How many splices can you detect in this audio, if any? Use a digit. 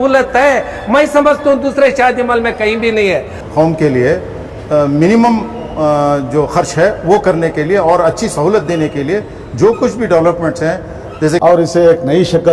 2